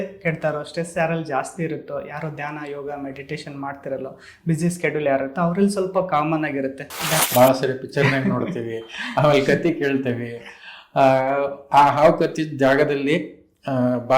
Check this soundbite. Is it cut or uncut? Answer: cut